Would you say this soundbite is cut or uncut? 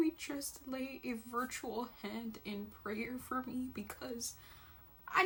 uncut